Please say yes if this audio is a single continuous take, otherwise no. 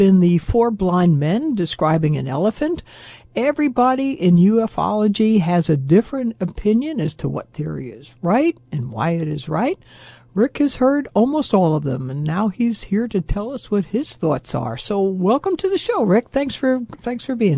yes